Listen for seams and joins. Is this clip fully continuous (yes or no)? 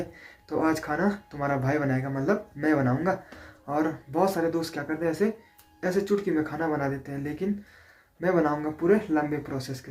yes